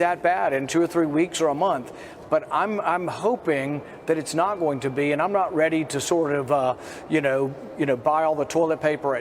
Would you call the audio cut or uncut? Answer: uncut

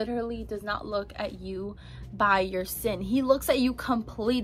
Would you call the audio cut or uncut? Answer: uncut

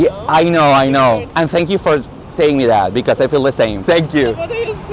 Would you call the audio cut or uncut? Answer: cut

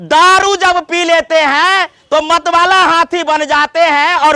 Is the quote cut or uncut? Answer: uncut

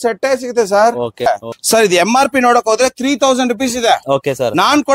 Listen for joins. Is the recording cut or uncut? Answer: cut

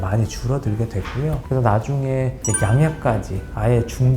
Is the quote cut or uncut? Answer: cut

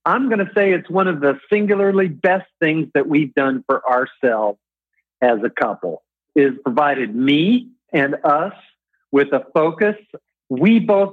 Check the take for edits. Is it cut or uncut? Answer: cut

